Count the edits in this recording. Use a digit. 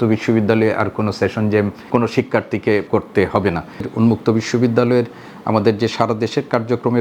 3